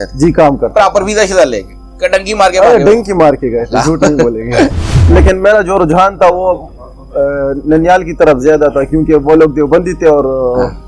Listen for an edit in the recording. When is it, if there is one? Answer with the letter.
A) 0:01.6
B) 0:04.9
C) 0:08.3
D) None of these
B